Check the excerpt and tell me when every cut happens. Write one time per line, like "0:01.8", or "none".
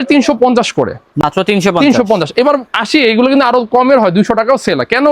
none